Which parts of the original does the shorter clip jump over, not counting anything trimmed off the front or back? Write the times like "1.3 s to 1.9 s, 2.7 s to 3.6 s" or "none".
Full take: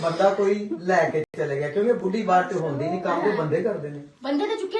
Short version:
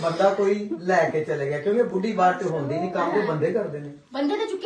1.3 s to 1.4 s